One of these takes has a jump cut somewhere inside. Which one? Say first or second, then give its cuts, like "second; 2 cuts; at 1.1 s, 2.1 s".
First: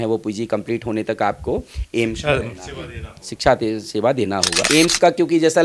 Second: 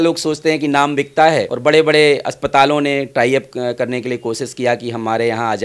first; 1 cut; at 4.6 s